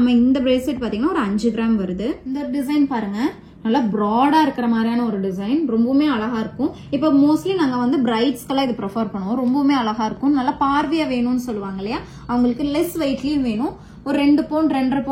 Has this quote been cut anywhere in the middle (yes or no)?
yes